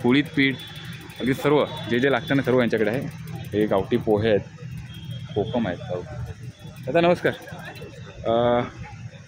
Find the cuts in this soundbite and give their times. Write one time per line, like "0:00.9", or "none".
none